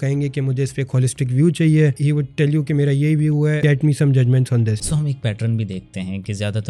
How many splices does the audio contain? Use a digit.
3